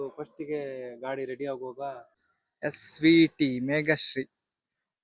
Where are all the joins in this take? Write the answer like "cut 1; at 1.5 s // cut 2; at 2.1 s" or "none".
cut 1; at 2.1 s